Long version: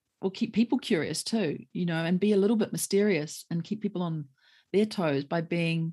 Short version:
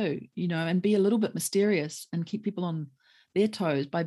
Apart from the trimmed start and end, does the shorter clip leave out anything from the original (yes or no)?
no